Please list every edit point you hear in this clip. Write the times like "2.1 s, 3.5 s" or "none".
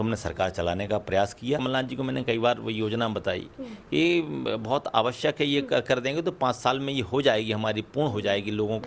1.6 s